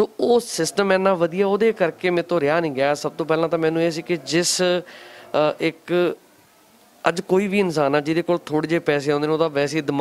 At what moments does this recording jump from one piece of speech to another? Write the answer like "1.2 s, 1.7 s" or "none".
none